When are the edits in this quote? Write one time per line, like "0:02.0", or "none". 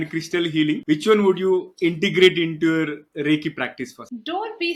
none